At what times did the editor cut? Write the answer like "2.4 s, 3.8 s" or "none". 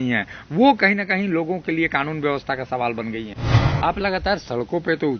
3.6 s